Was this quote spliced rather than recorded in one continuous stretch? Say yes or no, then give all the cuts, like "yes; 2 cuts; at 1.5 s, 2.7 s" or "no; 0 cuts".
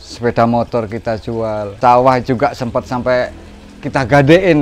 yes; 1 cut; at 1.8 s